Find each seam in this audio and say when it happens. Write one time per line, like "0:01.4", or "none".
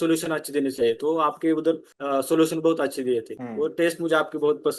0:01.9
0:03.4